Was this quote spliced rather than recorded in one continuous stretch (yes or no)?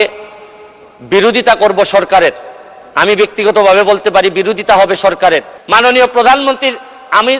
yes